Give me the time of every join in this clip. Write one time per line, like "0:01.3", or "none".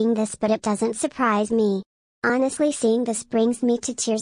0:01.5